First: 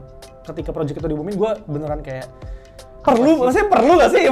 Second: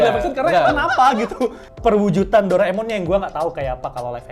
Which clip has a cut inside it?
second; 1 cut; at 1.7 s

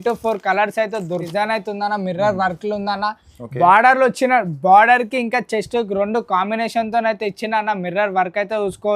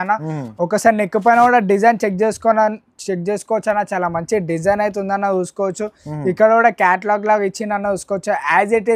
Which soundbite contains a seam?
first; 1 cut; at 1.3 s

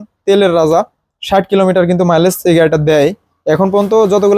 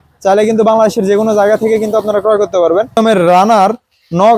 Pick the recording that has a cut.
second; 1 cut; at 3.0 s

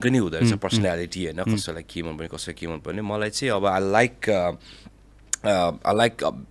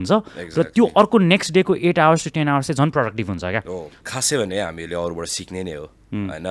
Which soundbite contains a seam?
second; 1 cut; at 4.0 s

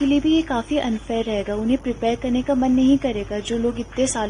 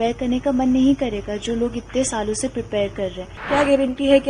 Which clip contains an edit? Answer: second; 1 cut; at 3.4 s

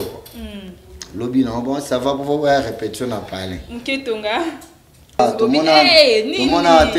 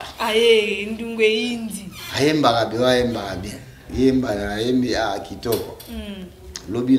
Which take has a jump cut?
first; 1 cut; at 5.2 s

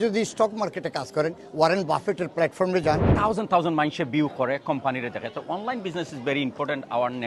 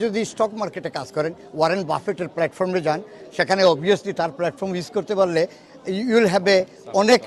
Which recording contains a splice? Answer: first; 1 cut; at 3.1 s

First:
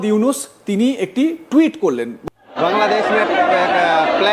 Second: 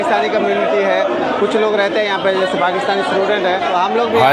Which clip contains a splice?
first; 1 cut; at 2.2 s

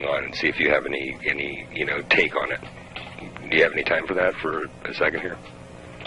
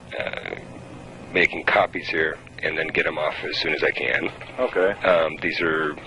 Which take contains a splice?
second; 1 cut; at 2.9 s

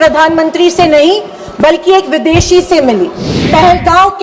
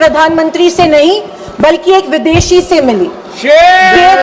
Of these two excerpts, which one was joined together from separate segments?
first; 1 cut; at 3.3 s

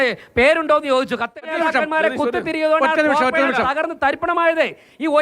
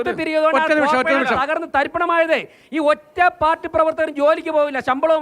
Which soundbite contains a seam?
first; 1 cut; at 1.3 s

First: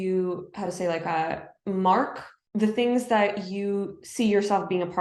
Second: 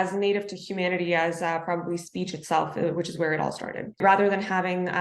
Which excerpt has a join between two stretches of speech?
second; 1 cut; at 4.0 s

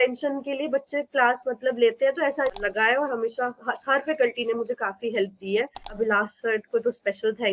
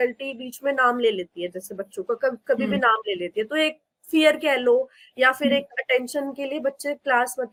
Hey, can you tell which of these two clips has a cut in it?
first; 2 cuts; at 2.6 s, 5.9 s

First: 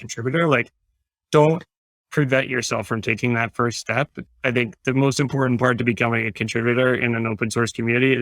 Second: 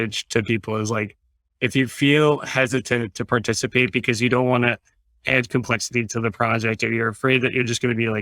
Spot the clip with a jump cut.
first; 1 cut; at 4.2 s

